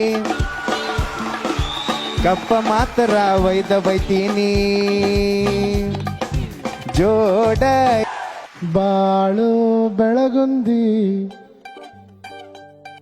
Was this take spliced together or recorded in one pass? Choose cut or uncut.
cut